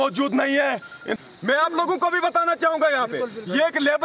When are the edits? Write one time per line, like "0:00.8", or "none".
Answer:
0:01.2